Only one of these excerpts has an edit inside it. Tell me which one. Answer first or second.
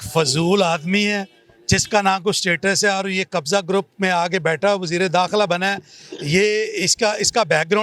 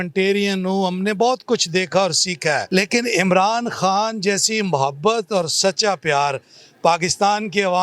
second